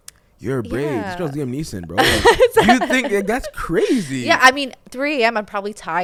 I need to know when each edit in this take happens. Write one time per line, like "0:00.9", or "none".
none

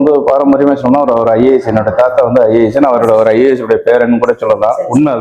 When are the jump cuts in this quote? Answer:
none

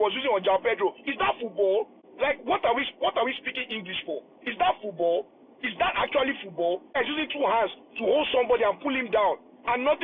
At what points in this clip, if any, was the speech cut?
0:02.0
0:07.0

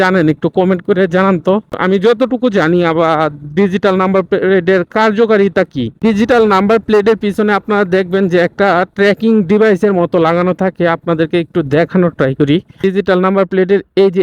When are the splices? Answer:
0:01.8
0:12.8

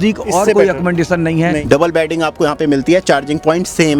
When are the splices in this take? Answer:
0:01.6

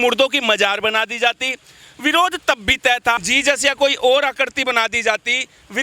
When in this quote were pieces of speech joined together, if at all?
0:03.2

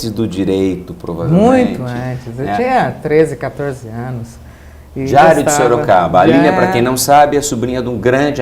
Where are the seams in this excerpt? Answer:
0:03.8

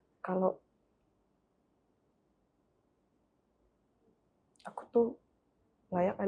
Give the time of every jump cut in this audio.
none

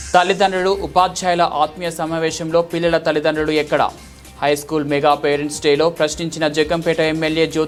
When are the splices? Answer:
none

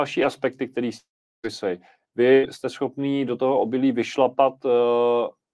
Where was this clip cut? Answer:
none

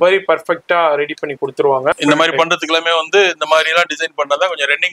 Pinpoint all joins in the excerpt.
0:01.9

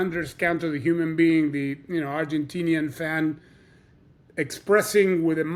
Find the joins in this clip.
none

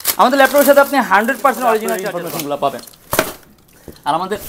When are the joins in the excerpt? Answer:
0:02.0

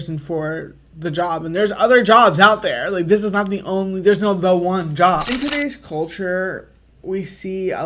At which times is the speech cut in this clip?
0:05.3

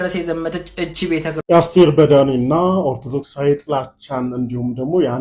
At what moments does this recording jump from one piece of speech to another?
0:01.4

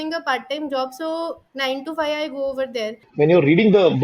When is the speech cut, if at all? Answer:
0:03.0

